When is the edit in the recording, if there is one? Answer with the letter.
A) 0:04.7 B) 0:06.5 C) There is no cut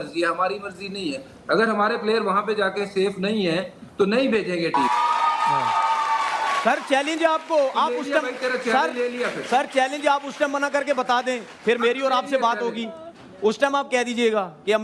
A